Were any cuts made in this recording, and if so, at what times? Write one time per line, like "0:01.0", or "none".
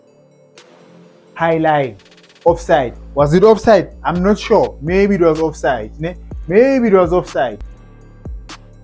0:07.8